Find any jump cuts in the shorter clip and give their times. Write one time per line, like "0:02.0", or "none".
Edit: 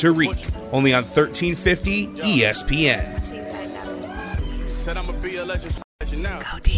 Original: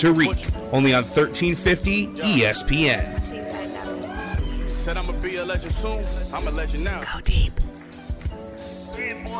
0:05.8